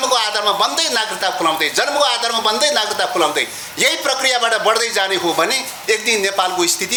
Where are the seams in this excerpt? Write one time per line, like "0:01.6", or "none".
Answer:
none